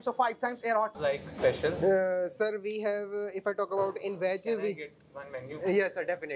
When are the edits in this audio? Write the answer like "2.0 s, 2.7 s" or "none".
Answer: 1.0 s